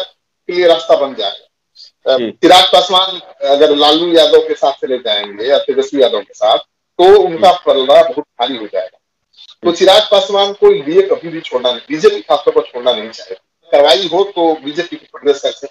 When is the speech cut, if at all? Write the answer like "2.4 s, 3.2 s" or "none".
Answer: 2.2 s, 13.7 s